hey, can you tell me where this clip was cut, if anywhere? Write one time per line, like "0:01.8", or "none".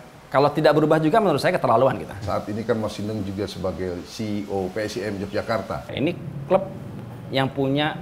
0:02.3
0:05.9